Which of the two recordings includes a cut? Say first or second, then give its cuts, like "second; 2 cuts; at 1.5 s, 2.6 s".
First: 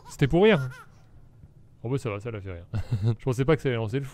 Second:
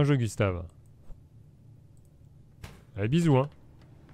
first; 1 cut; at 3.2 s